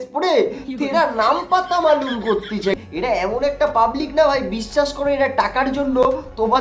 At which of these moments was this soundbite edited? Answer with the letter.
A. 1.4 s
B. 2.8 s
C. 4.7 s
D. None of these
B